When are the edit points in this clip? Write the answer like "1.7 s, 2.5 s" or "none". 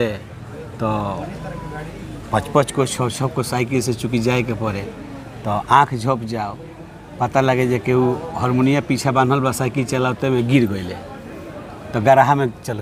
none

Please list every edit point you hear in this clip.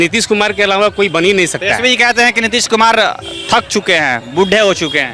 none

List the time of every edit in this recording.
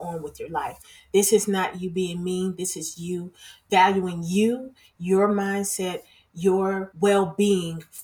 6.9 s

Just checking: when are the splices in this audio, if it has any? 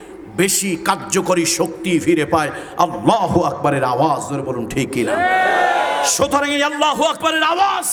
none

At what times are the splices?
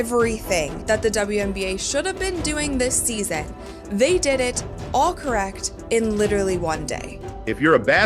4.7 s

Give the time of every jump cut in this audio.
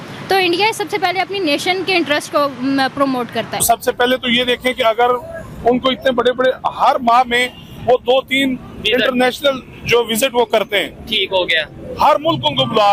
3.5 s

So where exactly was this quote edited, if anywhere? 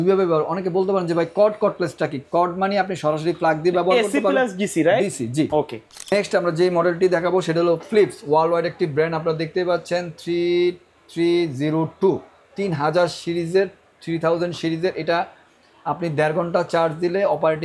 6.1 s

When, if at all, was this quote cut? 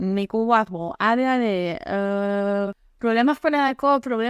2.8 s

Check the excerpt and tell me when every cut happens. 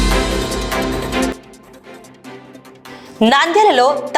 1.3 s, 2.9 s

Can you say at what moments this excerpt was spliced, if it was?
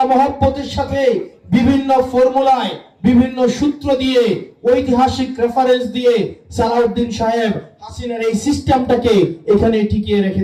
none

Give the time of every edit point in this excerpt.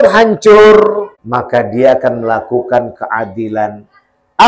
1.2 s

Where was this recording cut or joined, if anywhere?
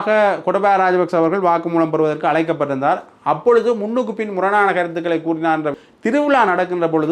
5.8 s

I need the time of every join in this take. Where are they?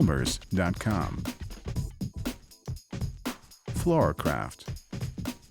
1.5 s, 3.8 s, 4.6 s

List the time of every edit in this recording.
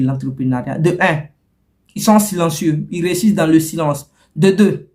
none

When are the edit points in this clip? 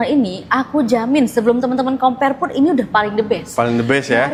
none

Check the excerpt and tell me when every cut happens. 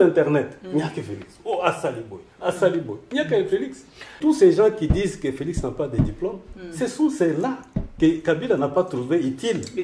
4.2 s

